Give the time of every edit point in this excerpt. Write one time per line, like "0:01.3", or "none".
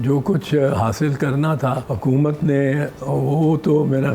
0:01.9